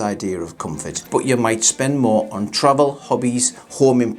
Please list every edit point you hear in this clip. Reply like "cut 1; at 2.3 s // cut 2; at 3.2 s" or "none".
cut 1; at 1.0 s